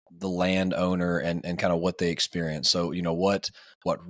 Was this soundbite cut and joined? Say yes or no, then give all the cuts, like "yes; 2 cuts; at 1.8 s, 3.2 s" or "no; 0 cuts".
no; 0 cuts